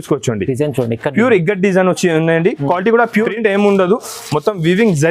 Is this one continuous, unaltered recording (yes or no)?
no